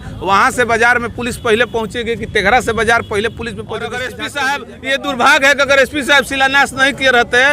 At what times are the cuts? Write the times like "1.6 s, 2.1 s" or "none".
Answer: 4.2 s